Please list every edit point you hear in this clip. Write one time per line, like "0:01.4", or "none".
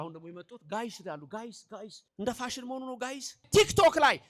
0:02.0
0:03.4